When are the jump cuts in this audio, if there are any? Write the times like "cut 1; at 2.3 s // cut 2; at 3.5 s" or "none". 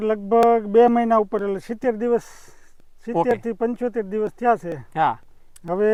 none

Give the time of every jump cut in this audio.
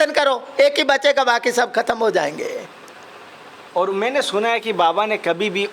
cut 1; at 3.5 s

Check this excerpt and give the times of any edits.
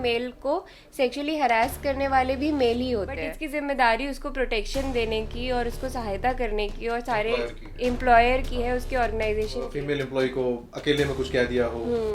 cut 1; at 3.3 s // cut 2; at 9.7 s

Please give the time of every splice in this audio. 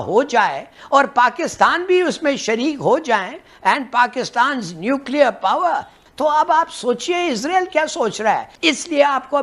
cut 1; at 5.9 s // cut 2; at 8.5 s

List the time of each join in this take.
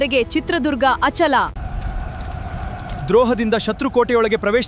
cut 1; at 1.6 s

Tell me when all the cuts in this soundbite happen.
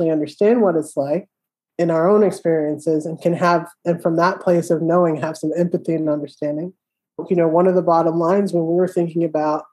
cut 1; at 7.2 s

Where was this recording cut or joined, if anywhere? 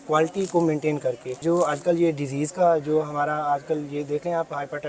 none

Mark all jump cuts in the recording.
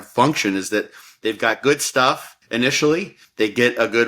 cut 1; at 2.3 s // cut 2; at 3.2 s

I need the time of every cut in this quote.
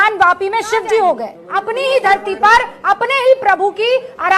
cut 1; at 1.4 s

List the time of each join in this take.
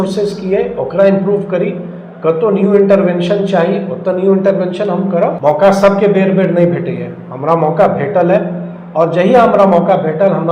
cut 1; at 5.4 s

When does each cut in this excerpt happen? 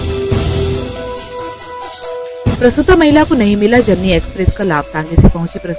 cut 1; at 1.0 s

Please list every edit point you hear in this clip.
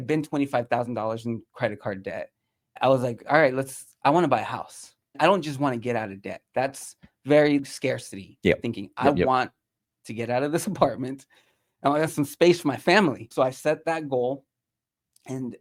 none

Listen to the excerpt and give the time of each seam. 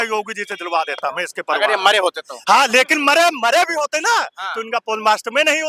none

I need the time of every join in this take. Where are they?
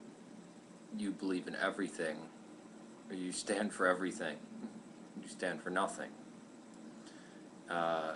none

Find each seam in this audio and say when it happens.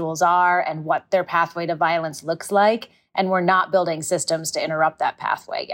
none

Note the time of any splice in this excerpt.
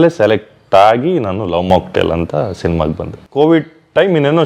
cut 1; at 3.1 s

